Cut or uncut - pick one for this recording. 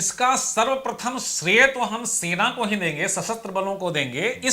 uncut